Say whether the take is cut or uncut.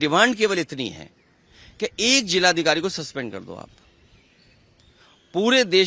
uncut